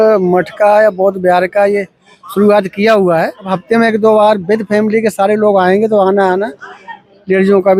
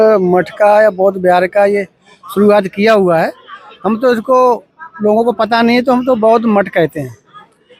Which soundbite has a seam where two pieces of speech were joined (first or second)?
first